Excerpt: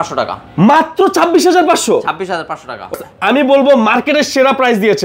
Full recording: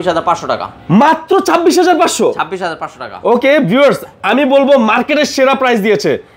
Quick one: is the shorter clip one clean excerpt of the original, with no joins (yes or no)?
no